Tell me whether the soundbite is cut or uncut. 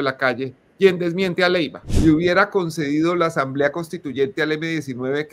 cut